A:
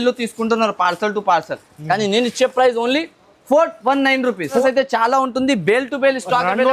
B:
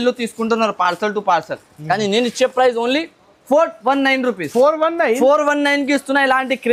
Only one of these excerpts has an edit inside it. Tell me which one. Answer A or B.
A